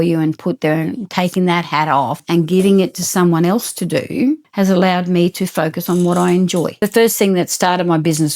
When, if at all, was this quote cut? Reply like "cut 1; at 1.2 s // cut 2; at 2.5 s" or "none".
cut 1; at 2.2 s // cut 2; at 4.5 s // cut 3; at 6.7 s

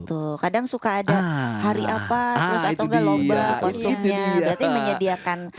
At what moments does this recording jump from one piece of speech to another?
none

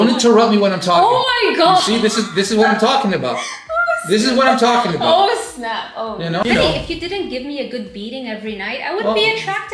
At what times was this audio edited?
cut 1; at 6.4 s

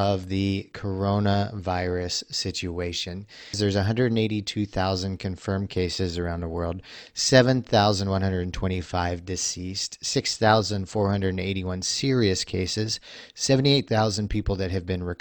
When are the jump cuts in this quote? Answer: cut 1; at 3.6 s

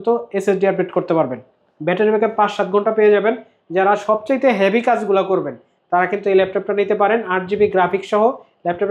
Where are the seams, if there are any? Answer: none

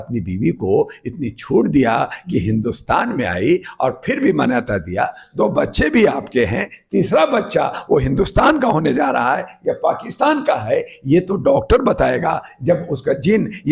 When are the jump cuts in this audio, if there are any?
none

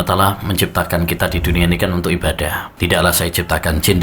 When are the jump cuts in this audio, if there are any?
cut 1; at 2.6 s

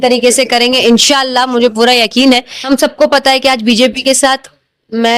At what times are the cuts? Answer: cut 1; at 2.5 s

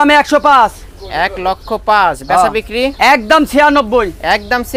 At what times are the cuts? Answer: none

